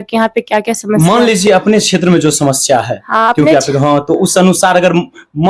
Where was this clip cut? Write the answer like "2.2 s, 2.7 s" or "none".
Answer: none